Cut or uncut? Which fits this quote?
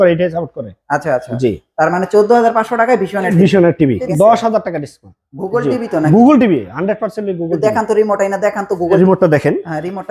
cut